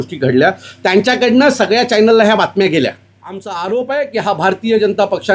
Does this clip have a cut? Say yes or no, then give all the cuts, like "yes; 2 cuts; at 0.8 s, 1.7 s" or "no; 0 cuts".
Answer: yes; 1 cut; at 3.5 s